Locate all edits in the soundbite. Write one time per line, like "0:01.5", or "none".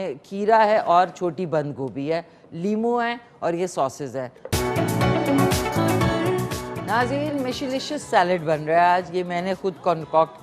0:04.4